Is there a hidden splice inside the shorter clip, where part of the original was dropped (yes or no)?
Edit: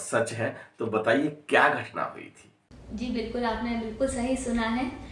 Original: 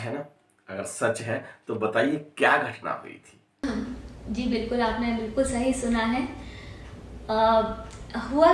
yes